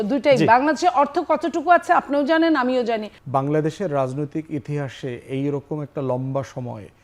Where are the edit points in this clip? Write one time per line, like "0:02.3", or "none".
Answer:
0:03.1

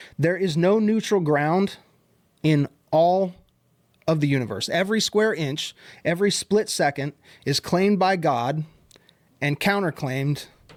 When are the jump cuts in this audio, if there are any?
none

